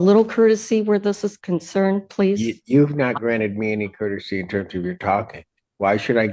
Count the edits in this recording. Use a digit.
0